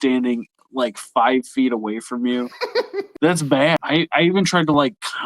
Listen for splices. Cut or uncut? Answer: cut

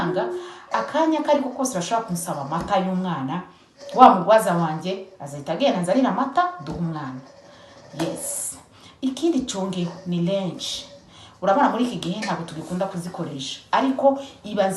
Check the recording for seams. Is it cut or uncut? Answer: uncut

